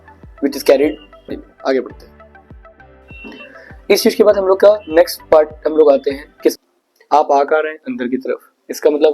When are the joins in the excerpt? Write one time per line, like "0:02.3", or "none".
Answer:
0:01.5
0:06.6